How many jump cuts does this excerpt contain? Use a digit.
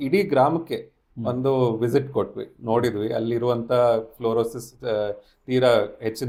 0